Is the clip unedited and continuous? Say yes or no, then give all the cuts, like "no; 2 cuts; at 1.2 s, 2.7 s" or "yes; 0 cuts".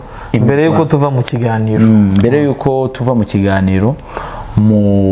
yes; 0 cuts